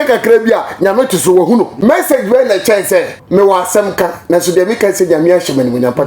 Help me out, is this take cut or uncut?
cut